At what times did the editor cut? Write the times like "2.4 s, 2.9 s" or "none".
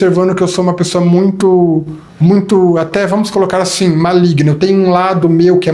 2.0 s